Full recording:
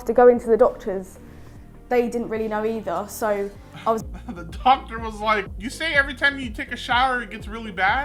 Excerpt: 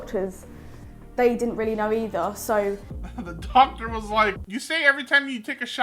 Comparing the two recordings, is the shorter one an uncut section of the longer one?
no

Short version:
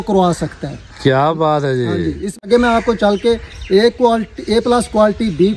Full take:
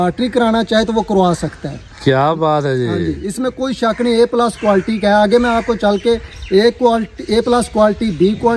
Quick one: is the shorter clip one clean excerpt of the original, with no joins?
no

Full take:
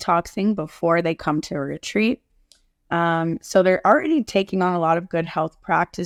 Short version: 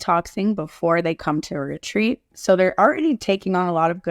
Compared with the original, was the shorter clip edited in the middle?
yes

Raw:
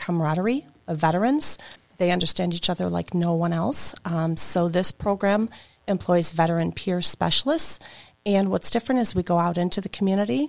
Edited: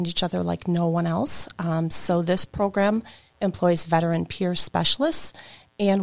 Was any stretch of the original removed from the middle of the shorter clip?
no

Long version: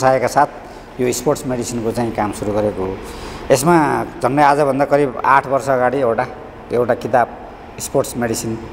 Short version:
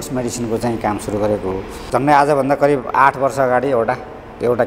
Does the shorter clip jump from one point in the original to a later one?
yes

